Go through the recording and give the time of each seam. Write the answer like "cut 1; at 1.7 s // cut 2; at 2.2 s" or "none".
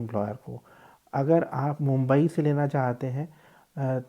none